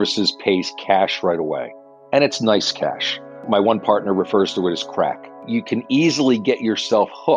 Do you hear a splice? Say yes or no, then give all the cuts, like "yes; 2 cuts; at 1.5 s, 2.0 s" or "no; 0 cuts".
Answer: yes; 2 cuts; at 3.4 s, 5.4 s